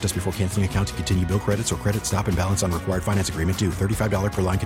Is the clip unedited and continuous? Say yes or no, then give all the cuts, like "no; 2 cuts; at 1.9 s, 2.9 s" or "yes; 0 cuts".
yes; 0 cuts